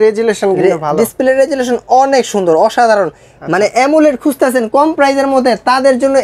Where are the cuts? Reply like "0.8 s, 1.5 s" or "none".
none